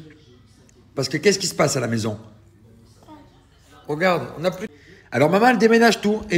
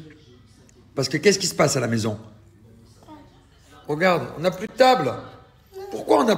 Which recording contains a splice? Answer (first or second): first